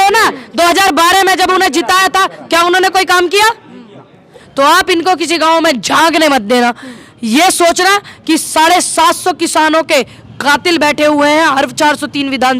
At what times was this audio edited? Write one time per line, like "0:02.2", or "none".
0:04.4